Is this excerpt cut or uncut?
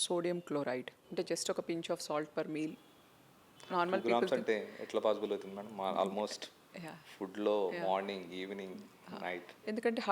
cut